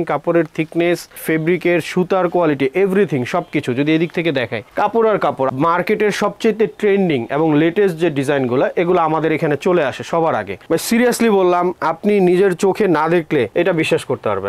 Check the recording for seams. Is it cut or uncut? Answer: cut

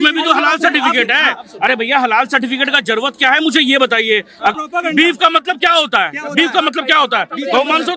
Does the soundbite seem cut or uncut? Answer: cut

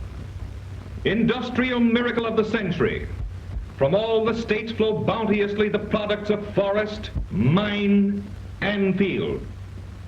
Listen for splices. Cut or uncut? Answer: cut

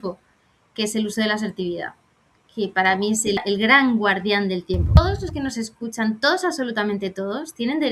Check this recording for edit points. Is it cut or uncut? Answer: cut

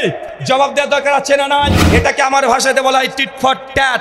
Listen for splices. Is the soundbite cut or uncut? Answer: cut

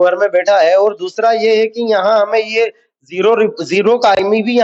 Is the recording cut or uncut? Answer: uncut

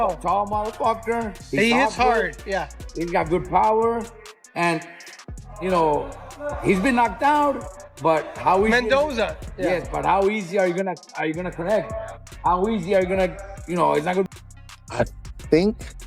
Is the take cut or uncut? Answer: cut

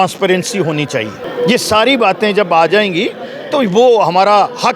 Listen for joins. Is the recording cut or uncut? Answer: cut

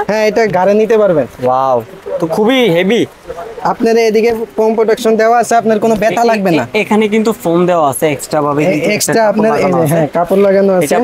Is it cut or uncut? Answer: uncut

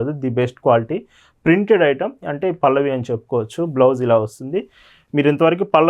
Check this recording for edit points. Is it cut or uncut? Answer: uncut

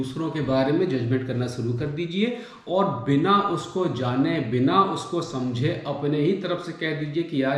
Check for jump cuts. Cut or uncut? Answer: uncut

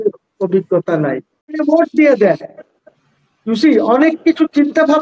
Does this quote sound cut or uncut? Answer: cut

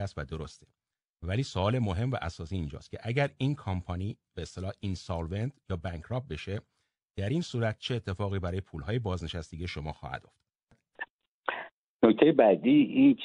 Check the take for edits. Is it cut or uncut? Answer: cut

